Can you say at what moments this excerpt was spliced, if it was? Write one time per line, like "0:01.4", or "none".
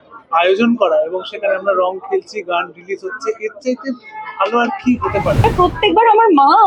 0:05.4